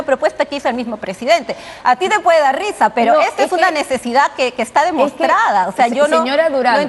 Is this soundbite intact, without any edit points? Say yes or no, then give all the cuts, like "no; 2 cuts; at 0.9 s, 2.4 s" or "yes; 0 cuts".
yes; 0 cuts